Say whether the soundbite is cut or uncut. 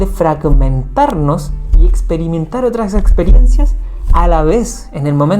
uncut